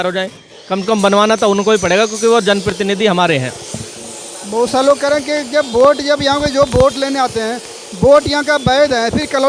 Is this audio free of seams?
yes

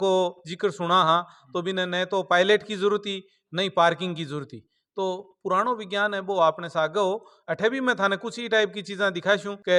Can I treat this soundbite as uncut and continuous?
yes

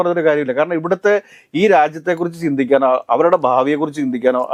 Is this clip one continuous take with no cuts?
yes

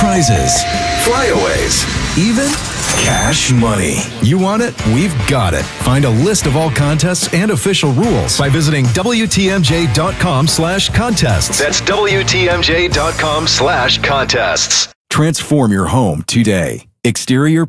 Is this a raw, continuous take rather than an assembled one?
no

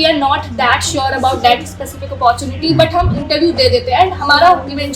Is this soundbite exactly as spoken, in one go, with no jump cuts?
yes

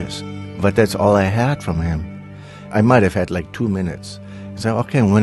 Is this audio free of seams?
no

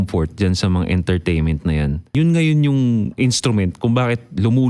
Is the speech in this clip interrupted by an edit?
yes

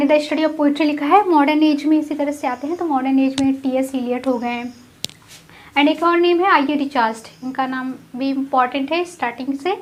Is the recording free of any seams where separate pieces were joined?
yes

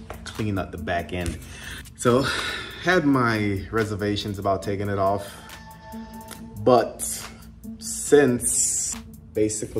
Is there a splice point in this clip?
no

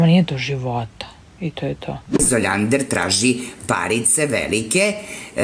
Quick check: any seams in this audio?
yes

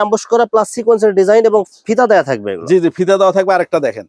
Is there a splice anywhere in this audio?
no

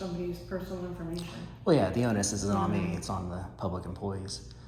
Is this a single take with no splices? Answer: yes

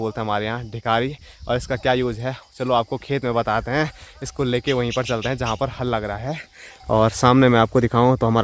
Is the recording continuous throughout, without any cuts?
yes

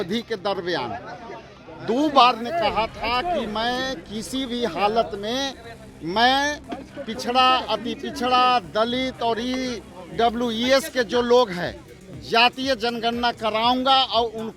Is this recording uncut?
yes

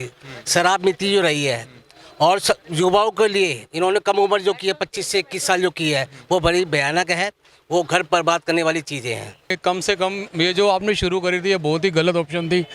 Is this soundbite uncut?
no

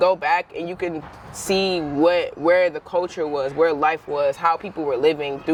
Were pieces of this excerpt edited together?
no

